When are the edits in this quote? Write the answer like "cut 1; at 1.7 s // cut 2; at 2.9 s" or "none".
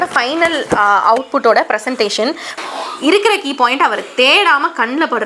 cut 1; at 2.5 s